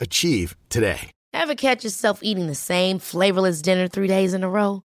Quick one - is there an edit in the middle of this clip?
yes; 1 cut; at 1.1 s

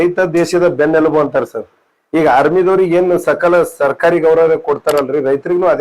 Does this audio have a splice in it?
no; 0 cuts

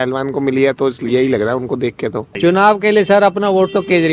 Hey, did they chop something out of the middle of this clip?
yes; 1 cut; at 2.3 s

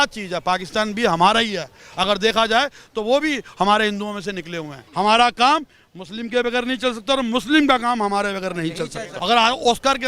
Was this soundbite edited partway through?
yes; 2 cuts; at 4.8 s, 9.1 s

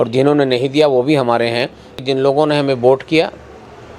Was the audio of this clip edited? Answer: yes; 1 cut; at 2.0 s

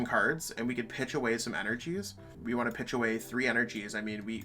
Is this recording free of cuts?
no; 1 cut; at 2.2 s

